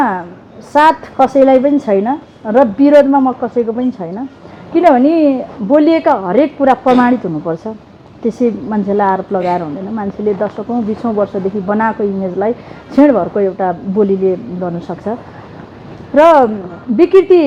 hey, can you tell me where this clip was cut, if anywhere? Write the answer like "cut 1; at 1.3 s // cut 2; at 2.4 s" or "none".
none